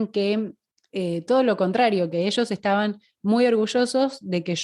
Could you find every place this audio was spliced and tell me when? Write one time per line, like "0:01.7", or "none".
none

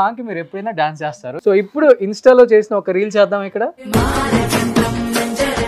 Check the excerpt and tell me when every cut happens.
0:01.2
0:03.8

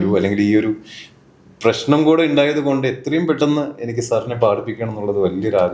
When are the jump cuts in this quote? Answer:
none

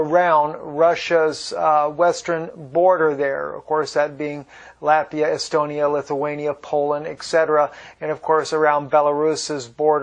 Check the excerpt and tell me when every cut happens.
none

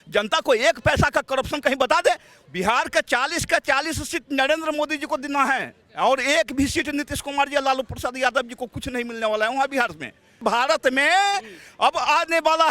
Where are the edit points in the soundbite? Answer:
0:02.4
0:10.3

